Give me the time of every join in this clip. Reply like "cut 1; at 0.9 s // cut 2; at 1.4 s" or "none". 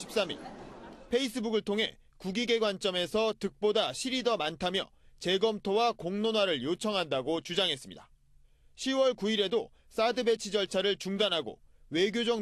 none